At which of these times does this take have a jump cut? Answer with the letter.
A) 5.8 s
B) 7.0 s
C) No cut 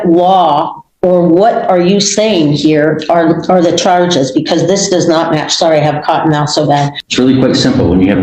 B